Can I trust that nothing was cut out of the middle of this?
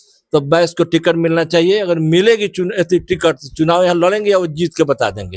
yes; 0 cuts

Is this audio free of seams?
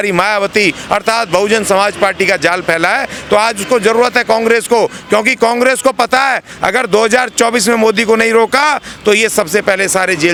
yes; 0 cuts

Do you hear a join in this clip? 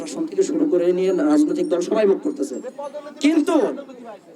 no; 0 cuts

